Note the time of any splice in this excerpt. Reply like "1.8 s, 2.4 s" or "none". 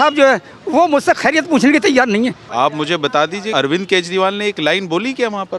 2.5 s, 3.5 s

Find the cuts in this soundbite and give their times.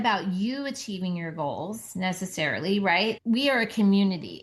3.2 s

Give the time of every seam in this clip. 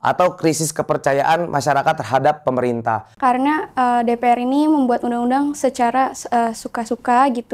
3.1 s

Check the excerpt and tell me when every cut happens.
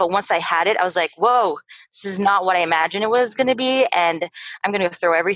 none

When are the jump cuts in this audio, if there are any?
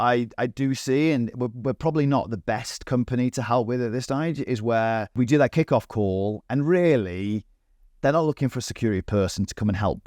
5.1 s

